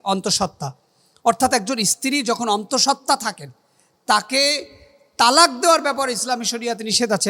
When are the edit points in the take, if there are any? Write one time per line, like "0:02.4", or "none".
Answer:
none